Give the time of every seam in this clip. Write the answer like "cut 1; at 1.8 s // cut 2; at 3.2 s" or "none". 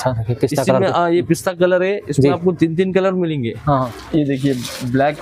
cut 1; at 4.0 s